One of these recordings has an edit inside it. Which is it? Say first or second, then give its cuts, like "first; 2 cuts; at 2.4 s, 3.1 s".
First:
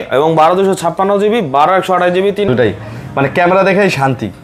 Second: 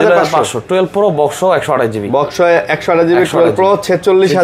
first; 1 cut; at 2.5 s